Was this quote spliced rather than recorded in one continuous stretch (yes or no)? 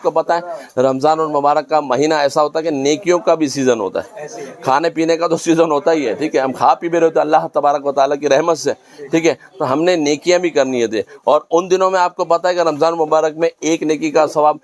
no